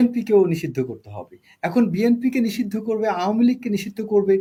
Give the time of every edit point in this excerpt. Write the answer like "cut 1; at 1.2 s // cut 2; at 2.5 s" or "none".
none